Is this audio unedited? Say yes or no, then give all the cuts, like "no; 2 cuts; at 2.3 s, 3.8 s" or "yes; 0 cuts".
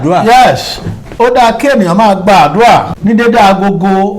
no; 1 cut; at 2.9 s